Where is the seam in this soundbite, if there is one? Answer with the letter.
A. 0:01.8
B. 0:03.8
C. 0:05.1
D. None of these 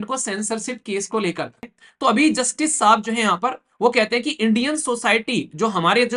A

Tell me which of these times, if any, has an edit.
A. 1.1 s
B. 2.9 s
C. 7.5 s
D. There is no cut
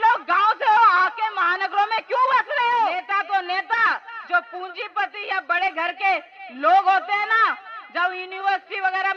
B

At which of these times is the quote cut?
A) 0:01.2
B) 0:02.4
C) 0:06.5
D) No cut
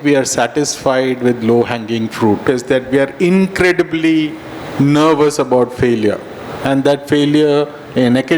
B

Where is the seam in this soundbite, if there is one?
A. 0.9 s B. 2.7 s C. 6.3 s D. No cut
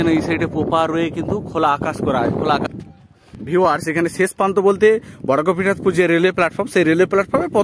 B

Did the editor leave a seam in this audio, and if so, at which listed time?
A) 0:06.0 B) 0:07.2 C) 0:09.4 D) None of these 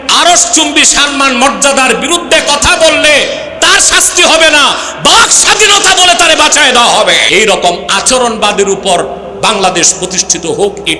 B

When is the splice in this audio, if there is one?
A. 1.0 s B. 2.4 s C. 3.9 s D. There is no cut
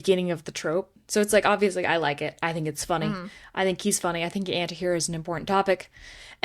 A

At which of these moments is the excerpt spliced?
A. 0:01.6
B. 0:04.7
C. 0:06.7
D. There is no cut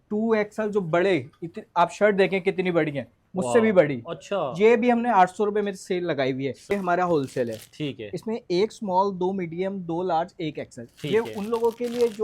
C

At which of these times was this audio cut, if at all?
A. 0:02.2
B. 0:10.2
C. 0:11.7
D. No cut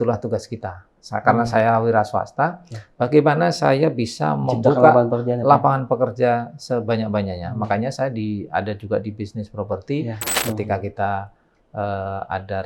B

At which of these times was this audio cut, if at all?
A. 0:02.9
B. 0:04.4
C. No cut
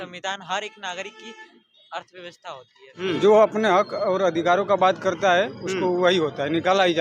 A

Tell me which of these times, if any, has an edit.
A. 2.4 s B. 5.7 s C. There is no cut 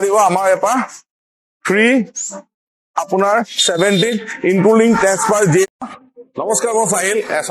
B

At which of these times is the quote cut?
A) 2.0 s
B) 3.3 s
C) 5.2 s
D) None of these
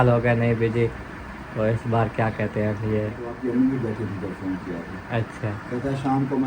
B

